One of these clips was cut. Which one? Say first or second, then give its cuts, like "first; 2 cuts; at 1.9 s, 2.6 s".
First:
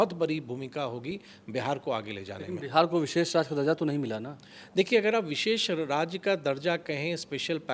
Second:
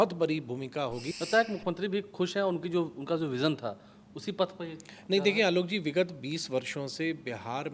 second; 1 cut; at 1.1 s